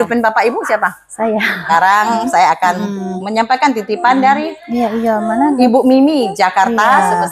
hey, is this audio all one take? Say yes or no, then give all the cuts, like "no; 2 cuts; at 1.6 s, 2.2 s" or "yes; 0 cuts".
no; 1 cut; at 1.6 s